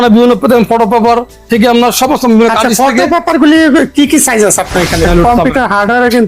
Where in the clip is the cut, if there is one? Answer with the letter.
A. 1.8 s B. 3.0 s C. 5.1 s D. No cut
C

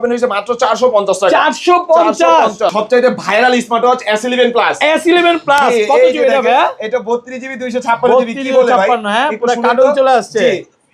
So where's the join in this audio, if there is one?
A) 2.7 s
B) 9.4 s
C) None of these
A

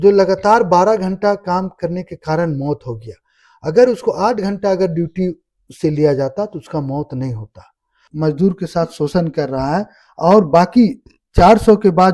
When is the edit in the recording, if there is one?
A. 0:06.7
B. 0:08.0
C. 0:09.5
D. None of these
B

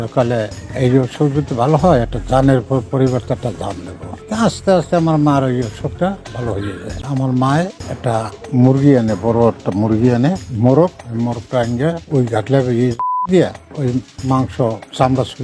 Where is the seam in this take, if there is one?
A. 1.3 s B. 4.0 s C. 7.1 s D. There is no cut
C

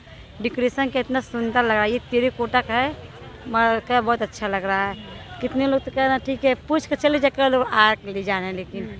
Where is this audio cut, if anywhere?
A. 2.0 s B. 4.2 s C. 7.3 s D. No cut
D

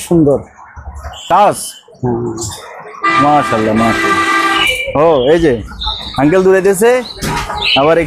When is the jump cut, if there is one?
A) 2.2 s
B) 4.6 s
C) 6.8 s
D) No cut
B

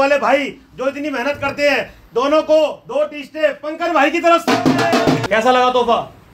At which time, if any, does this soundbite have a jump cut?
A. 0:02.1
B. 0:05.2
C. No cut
B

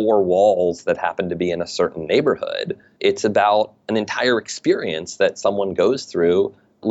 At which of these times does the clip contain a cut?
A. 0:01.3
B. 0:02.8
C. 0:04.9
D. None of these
B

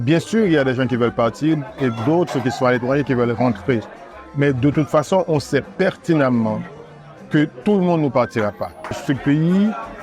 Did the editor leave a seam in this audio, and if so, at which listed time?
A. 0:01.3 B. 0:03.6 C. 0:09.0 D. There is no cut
C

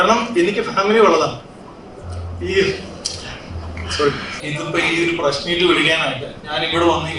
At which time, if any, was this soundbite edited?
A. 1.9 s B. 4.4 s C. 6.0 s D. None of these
B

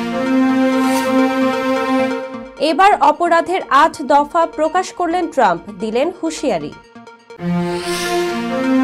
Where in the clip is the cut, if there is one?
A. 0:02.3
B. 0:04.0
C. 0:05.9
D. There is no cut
A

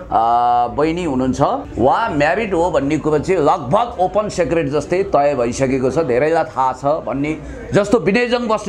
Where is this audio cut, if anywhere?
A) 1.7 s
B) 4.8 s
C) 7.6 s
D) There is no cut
A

